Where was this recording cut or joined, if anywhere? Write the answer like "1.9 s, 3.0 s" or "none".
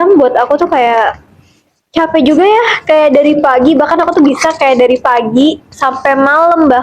none